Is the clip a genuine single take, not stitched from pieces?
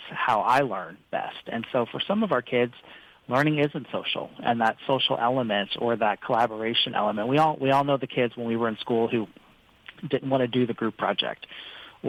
yes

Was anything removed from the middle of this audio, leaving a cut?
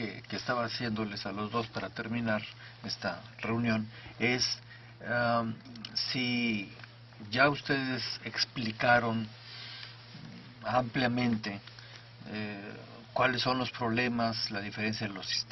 yes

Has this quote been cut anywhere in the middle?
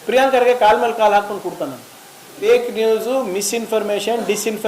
yes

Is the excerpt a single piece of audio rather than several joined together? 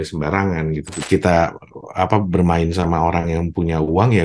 no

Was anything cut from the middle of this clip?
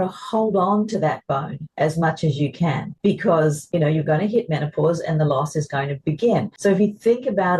yes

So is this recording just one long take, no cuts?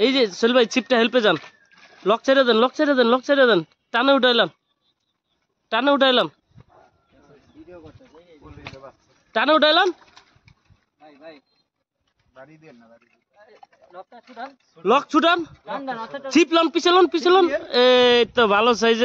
yes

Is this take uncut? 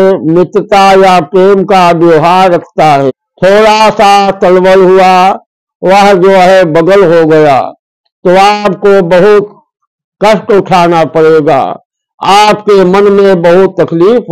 no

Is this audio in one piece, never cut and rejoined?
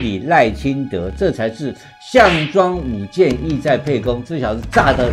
yes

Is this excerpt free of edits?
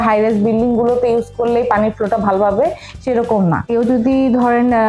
no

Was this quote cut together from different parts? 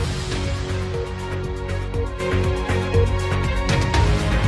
yes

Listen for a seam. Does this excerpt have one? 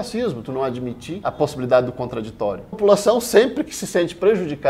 yes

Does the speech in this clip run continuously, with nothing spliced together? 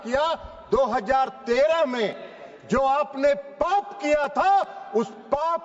yes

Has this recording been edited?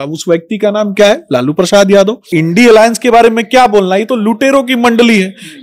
yes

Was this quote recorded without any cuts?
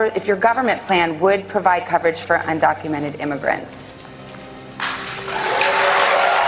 yes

